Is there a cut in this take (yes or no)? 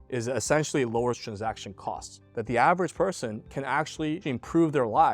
yes